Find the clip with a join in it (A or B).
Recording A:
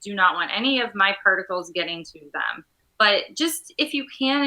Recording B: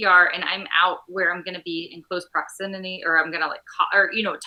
A